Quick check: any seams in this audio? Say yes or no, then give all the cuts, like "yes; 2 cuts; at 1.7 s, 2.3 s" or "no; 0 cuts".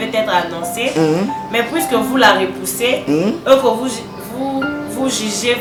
no; 0 cuts